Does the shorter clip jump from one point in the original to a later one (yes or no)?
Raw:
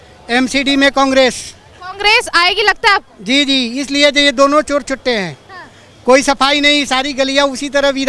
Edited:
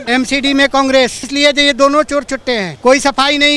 yes